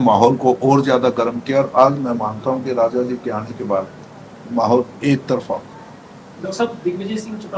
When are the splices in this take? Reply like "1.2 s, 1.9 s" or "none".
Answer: none